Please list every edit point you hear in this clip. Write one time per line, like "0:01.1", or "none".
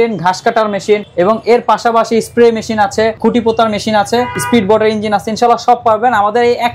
0:01.1
0:03.2
0:04.4